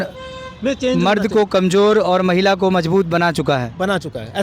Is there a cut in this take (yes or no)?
no